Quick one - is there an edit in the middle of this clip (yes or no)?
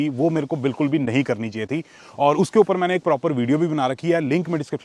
no